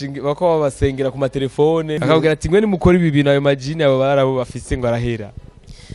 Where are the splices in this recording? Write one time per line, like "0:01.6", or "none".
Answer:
0:02.0